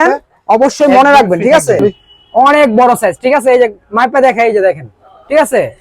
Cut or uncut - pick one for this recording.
cut